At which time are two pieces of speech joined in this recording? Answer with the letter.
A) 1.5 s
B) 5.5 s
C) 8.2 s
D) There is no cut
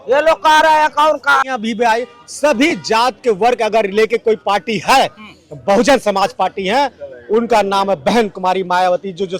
A